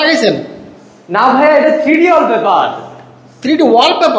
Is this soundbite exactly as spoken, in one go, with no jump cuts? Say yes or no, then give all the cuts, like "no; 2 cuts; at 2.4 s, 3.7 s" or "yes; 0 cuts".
yes; 0 cuts